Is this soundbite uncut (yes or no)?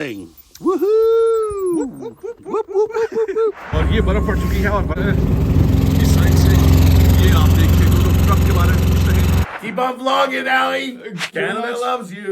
no